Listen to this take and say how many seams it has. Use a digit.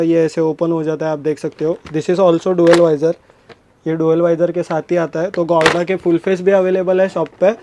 0